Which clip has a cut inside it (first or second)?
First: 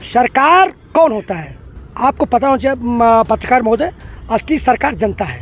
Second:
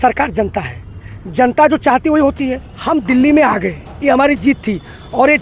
second